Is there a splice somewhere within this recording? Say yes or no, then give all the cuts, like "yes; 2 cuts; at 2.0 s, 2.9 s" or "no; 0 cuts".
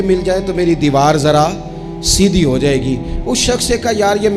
no; 0 cuts